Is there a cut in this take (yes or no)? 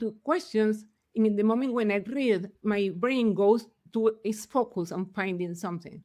yes